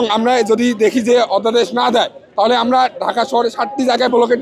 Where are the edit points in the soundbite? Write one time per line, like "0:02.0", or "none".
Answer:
none